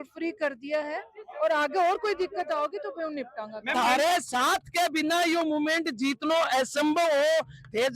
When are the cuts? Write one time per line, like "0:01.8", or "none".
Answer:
0:03.7